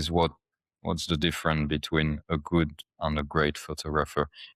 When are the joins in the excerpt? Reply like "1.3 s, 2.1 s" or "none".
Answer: none